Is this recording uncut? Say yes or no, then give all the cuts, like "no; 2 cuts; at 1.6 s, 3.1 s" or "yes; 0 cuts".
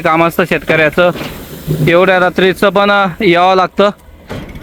yes; 0 cuts